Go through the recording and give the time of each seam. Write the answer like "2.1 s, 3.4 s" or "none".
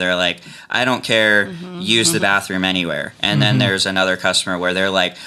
none